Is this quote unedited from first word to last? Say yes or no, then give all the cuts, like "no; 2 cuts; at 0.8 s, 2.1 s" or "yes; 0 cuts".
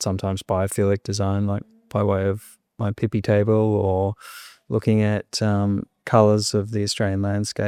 yes; 0 cuts